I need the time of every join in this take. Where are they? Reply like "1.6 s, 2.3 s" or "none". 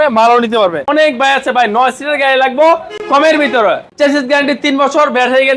0.9 s, 2.9 s, 3.9 s